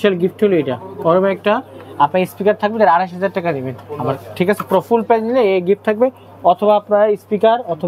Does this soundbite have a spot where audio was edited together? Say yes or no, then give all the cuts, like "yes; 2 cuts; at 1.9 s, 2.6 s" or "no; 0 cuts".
no; 0 cuts